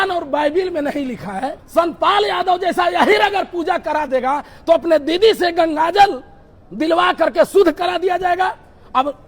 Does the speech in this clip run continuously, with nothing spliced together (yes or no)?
no